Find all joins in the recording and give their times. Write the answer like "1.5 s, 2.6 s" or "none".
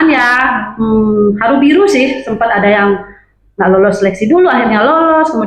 none